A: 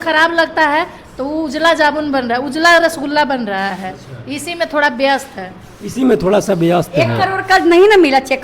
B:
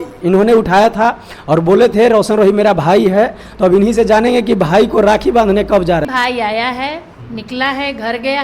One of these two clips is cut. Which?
B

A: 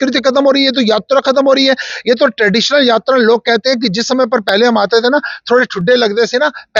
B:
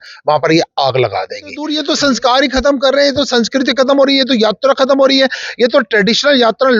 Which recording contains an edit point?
B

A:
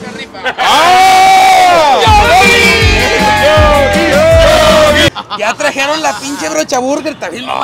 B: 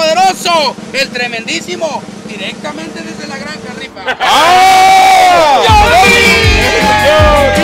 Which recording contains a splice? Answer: A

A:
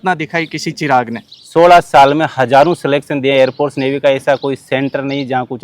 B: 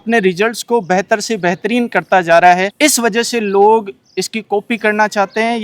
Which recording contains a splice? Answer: A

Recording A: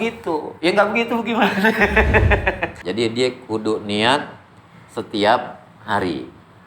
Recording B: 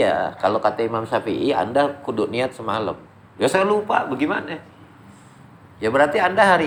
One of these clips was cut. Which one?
A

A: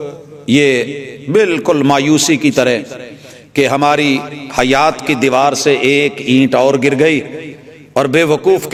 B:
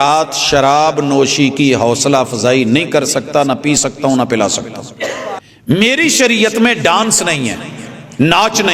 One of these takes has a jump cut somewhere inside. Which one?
B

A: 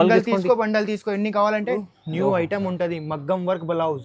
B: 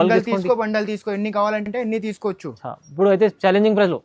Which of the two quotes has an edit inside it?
A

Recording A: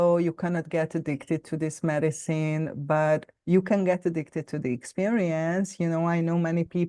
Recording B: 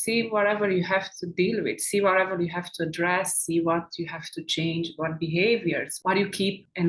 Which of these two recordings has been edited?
B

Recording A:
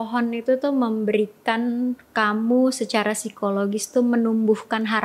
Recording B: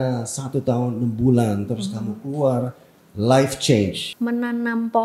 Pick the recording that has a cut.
B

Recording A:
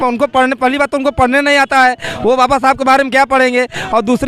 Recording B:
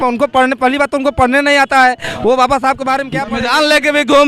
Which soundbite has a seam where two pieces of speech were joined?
B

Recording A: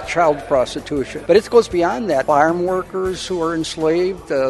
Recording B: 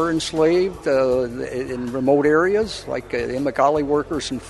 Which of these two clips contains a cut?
A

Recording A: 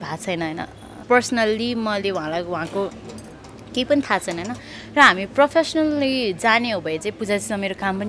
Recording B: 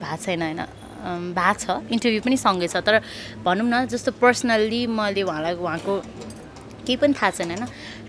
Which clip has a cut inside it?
A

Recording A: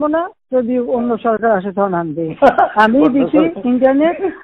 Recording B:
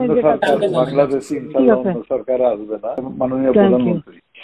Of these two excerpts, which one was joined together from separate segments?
B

